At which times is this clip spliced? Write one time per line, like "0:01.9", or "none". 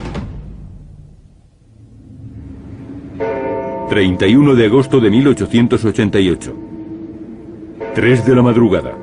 none